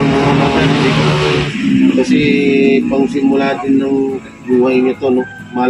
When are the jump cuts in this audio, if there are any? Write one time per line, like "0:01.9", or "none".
none